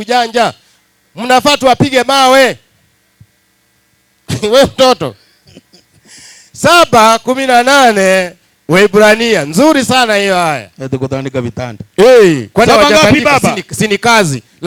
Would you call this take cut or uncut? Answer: uncut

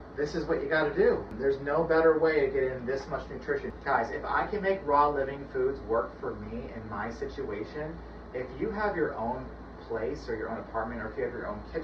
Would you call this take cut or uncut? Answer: cut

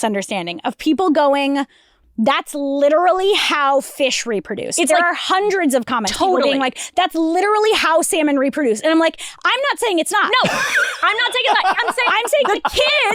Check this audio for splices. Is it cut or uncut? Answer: uncut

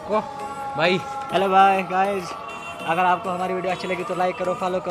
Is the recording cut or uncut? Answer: uncut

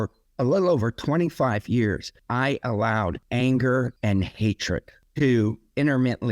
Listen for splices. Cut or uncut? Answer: cut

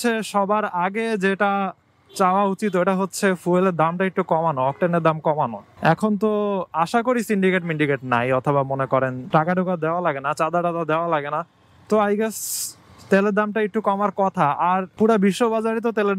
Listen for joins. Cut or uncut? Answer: uncut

